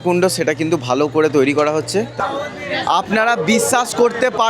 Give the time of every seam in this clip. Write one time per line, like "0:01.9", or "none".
0:02.1